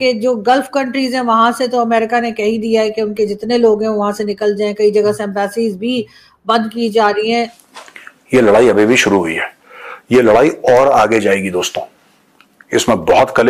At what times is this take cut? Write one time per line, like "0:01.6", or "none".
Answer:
0:07.5